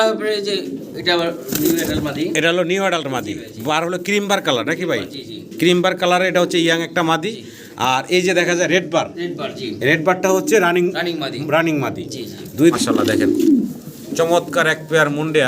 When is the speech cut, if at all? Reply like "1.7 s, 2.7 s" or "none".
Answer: 12.7 s